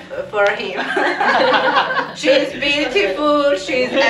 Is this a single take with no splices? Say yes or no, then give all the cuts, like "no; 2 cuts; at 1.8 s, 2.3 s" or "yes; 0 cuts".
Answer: no; 1 cut; at 2.1 s